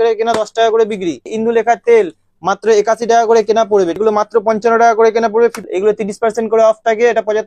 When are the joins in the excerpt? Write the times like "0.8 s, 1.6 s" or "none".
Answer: 1.3 s, 4.0 s, 5.7 s

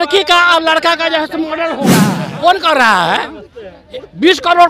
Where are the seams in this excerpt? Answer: 1.9 s

